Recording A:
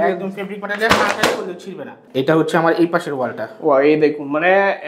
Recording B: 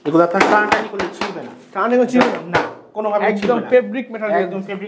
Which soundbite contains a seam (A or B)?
A